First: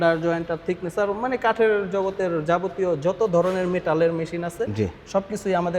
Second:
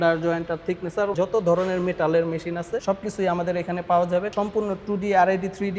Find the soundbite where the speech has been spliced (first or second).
second